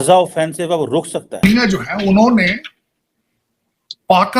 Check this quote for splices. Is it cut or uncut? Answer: cut